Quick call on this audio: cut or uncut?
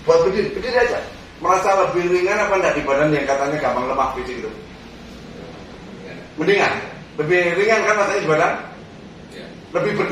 uncut